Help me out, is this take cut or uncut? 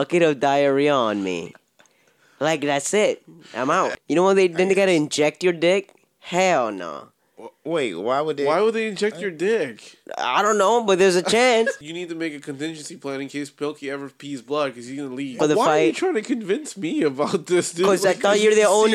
cut